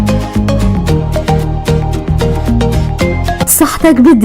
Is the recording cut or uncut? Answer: cut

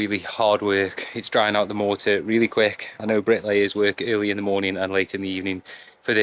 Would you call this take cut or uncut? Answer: uncut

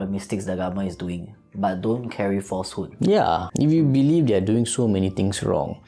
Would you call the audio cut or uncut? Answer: cut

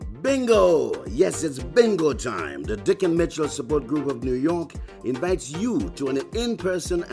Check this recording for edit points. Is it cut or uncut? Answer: cut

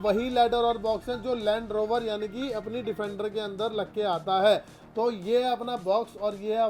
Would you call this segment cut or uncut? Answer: uncut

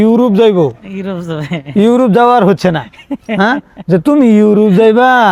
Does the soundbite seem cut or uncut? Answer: uncut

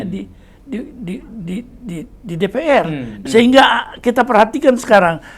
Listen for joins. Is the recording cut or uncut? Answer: cut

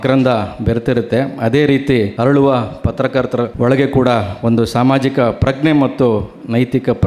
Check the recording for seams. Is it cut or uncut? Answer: cut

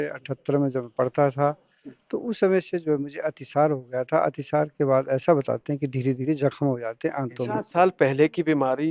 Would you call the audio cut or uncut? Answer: cut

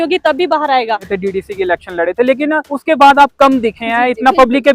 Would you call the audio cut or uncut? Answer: cut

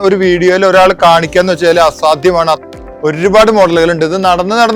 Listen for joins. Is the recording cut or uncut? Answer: cut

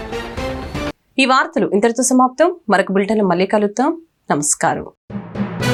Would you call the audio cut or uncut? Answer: uncut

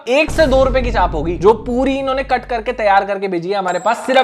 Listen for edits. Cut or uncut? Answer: uncut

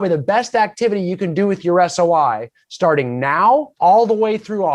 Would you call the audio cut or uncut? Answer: cut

